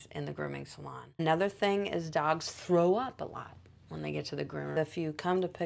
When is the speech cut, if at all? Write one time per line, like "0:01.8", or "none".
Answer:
0:01.2
0:04.8